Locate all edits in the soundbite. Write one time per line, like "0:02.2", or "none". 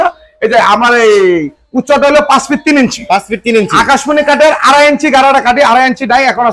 none